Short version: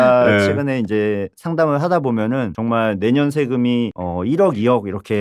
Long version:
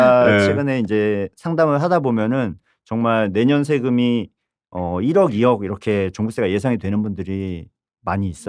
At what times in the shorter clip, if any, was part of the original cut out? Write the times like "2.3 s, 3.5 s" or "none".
2.5 s, 4.0 s